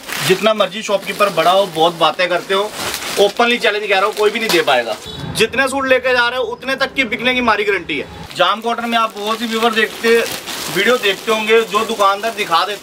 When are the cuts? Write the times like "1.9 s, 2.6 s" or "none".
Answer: 5.0 s, 8.1 s